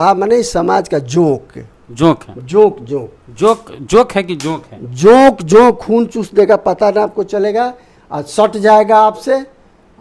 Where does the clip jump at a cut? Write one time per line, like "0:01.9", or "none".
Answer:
none